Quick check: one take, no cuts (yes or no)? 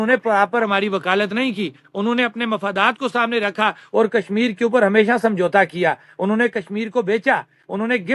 yes